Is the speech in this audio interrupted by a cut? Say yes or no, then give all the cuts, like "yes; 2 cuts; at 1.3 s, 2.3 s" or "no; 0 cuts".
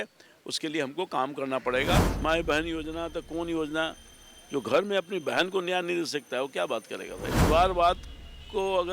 yes; 2 cuts; at 2.0 s, 7.4 s